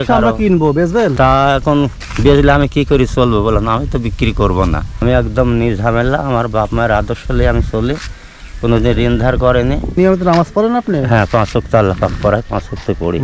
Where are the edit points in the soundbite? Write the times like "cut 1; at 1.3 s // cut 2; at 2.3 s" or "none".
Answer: cut 1; at 1.1 s // cut 2; at 5.0 s // cut 3; at 9.9 s